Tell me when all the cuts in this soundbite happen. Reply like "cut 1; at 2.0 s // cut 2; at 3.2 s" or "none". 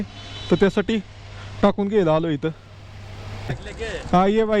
cut 1; at 3.6 s

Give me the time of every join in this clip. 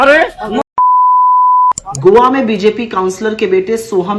cut 1; at 1.9 s

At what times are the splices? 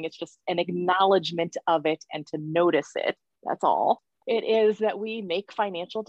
cut 1; at 3.3 s // cut 2; at 4.1 s

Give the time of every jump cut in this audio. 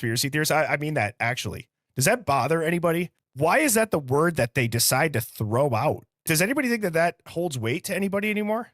cut 1; at 3.2 s // cut 2; at 6.1 s

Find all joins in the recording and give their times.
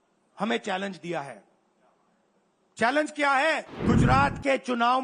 cut 1; at 3.7 s

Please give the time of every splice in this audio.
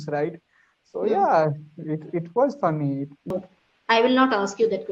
cut 1; at 3.3 s

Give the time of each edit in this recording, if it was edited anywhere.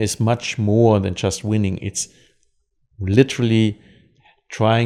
none

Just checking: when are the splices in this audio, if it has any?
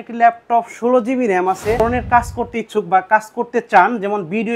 cut 1; at 1.8 s

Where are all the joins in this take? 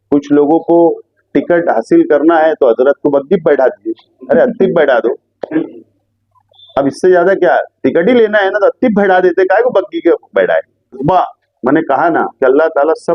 cut 1; at 11.0 s

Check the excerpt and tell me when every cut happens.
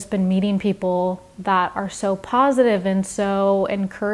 none

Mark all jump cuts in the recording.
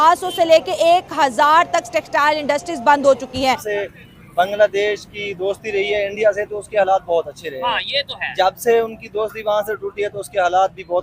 cut 1; at 3.7 s

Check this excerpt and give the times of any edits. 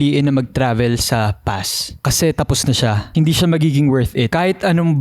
cut 1; at 3.0 s // cut 2; at 4.3 s

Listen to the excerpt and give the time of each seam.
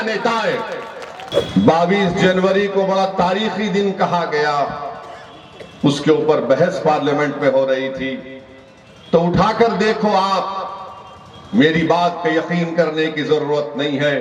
cut 1; at 1.3 s

